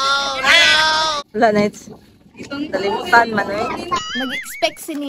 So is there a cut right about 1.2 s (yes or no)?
yes